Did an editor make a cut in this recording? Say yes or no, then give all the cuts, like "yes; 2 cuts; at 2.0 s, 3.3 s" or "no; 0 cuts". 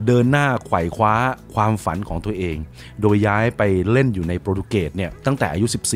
no; 0 cuts